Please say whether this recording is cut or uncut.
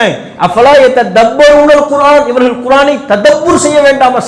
uncut